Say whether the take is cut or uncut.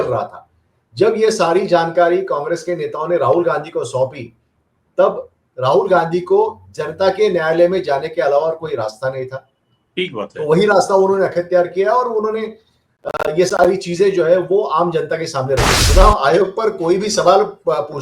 cut